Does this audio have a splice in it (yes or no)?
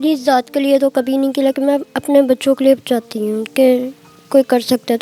no